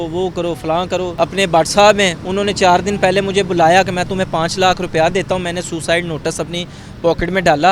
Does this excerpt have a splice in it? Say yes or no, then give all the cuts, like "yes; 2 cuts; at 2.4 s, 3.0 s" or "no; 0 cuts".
yes; 1 cut; at 1.1 s